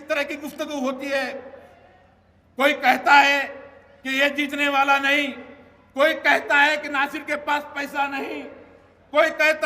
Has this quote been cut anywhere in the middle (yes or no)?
no